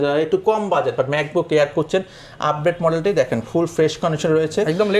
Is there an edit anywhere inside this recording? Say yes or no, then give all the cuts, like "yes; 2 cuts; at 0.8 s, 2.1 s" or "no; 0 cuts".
no; 0 cuts